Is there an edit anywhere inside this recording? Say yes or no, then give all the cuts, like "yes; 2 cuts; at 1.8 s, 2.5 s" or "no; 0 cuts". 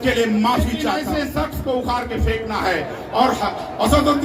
yes; 1 cut; at 1.0 s